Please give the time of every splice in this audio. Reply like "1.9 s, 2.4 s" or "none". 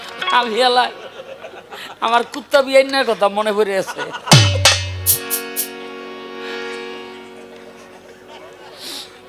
none